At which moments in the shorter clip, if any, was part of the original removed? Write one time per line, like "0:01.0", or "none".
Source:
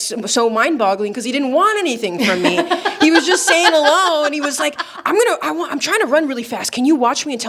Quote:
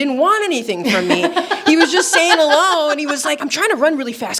0:03.5